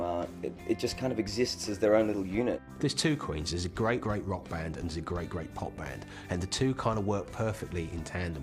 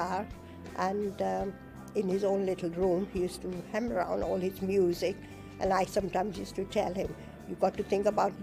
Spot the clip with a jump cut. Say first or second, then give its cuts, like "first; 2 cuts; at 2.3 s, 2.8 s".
first; 2 cuts; at 2.6 s, 4.0 s